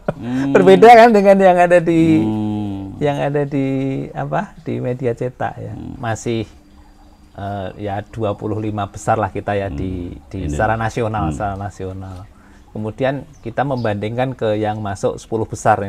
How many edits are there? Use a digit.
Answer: 1